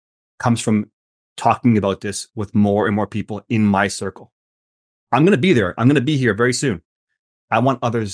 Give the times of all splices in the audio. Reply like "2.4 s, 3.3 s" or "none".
none